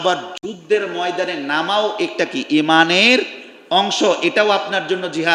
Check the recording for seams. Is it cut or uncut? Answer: uncut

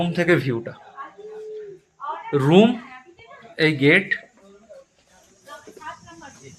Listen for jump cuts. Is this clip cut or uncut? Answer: uncut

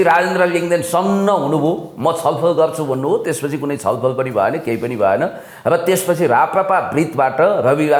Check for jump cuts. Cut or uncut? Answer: uncut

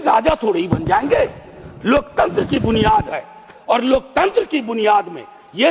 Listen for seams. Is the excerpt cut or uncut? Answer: uncut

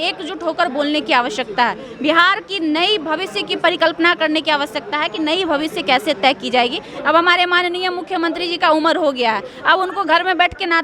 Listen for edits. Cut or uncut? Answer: cut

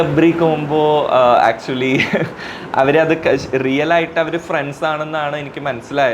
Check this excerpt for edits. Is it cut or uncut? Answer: uncut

